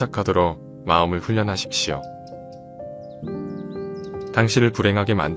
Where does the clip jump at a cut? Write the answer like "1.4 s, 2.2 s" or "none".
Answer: none